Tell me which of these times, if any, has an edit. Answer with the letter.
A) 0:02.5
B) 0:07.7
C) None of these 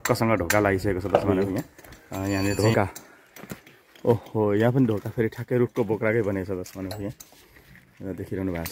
A